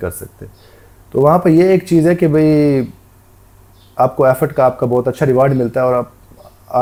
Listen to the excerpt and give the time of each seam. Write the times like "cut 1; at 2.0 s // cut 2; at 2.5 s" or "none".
none